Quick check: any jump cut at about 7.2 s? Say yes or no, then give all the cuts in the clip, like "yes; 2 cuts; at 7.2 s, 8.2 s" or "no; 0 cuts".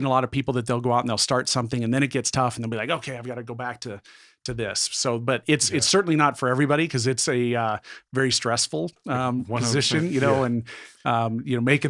no; 0 cuts